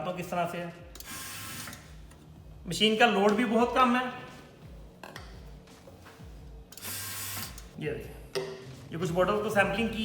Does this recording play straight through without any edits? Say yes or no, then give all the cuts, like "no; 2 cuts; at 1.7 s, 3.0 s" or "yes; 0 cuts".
no; 1 cut; at 7.7 s